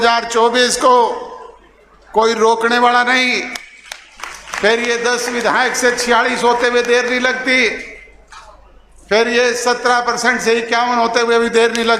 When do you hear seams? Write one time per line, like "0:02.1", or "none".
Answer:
none